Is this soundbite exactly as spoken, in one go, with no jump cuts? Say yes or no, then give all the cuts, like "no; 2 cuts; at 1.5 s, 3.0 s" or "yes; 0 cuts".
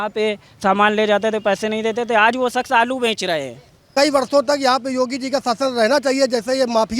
no; 1 cut; at 3.8 s